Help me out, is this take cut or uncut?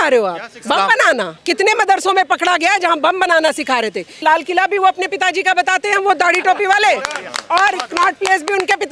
cut